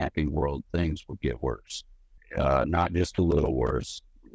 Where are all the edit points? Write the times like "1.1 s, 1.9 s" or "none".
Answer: 2.1 s